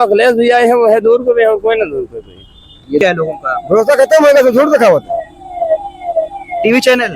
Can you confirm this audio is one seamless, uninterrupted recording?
no; 1 cut; at 3.0 s

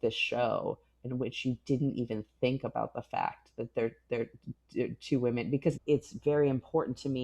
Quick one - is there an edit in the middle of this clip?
yes; 1 cut; at 5.8 s

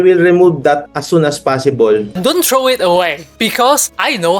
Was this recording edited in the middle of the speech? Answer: yes; 3 cuts; at 0.9 s, 2.2 s, 3.5 s

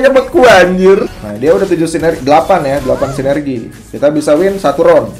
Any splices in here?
yes; 1 cut; at 1.2 s

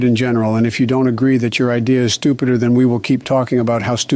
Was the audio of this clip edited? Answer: no; 0 cuts

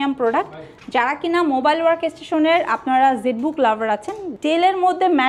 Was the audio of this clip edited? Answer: yes; 1 cut; at 4.3 s

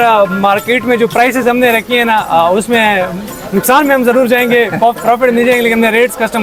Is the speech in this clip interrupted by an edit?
no; 0 cuts

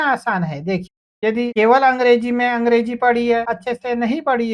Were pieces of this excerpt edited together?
yes; 2 cuts; at 1.1 s, 3.5 s

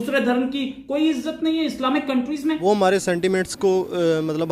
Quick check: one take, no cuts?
no; 1 cut; at 2.6 s

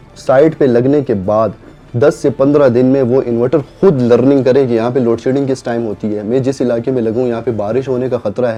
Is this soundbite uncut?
yes; 0 cuts

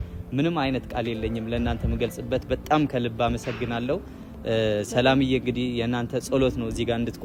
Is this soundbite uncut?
yes; 0 cuts

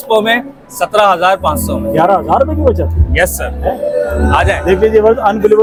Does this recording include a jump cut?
no; 0 cuts

